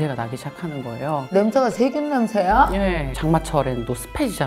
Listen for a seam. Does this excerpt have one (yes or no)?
yes